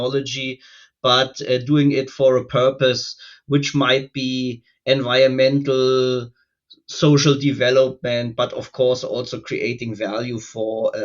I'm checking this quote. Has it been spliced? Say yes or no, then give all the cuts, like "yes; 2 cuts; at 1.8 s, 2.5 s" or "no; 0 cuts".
no; 0 cuts